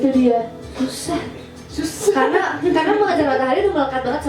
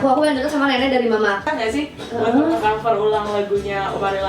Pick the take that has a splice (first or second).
second